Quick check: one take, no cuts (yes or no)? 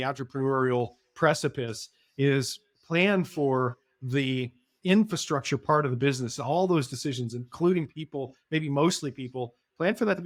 yes